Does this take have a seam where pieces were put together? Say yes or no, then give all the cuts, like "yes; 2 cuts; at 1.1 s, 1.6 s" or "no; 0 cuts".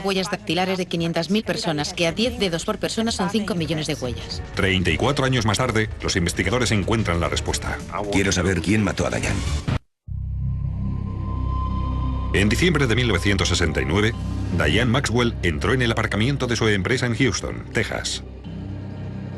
no; 0 cuts